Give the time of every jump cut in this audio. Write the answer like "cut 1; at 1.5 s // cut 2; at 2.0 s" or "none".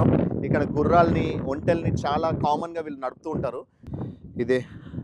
cut 1; at 3.8 s